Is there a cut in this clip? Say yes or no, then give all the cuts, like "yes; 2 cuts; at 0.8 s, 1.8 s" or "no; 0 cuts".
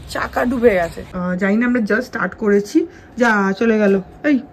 yes; 1 cut; at 1.1 s